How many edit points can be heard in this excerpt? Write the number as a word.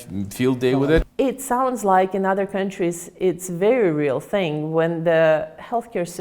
one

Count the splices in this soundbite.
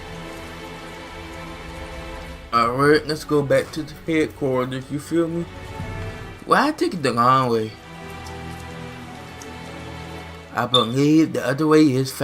one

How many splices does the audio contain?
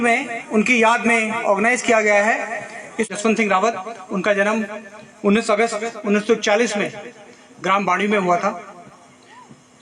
one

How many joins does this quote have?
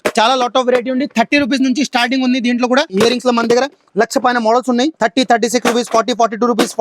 two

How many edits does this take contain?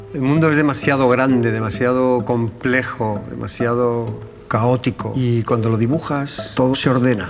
two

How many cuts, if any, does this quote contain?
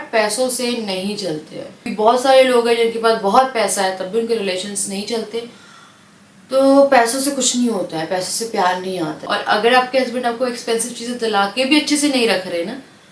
two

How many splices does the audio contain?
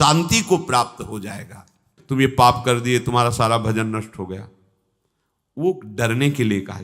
one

